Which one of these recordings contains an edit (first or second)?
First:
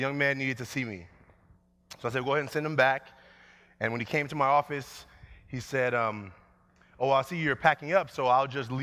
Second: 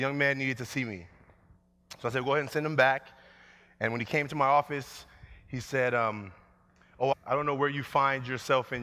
first